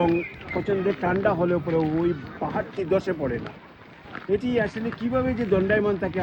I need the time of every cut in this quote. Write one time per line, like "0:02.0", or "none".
none